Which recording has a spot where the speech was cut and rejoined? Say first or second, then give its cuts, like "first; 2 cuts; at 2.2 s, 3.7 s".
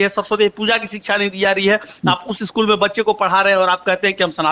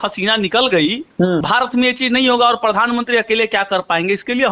second; 1 cut; at 1.4 s